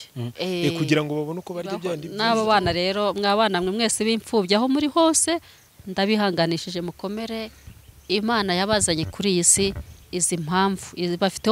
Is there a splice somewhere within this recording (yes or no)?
yes